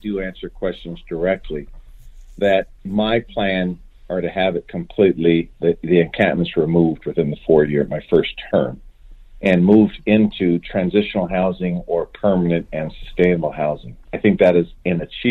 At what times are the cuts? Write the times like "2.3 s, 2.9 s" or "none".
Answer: none

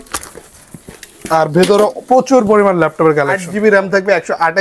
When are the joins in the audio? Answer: 3.4 s

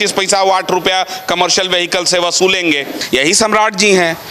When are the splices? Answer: 2.9 s

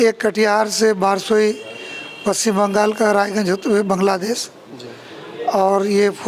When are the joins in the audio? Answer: none

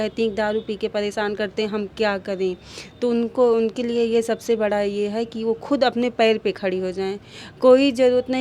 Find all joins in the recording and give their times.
none

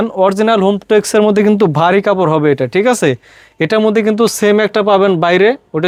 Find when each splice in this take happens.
none

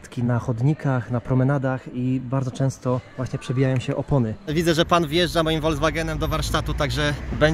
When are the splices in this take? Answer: 3.1 s, 4.5 s

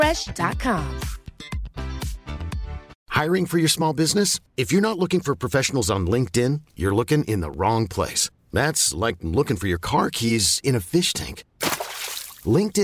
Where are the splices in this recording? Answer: 2.9 s

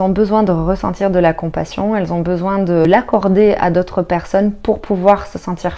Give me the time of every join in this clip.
2.8 s

